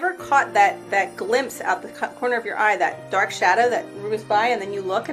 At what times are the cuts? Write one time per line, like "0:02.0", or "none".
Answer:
none